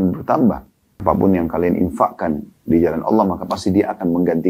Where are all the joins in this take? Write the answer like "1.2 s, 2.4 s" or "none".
1.0 s